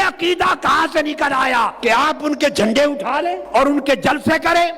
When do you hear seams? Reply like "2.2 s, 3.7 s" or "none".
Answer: 1.7 s, 3.4 s